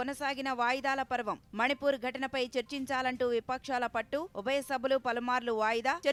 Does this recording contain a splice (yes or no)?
no